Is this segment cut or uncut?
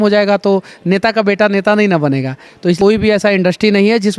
cut